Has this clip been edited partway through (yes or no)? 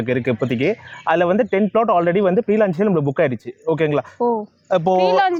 no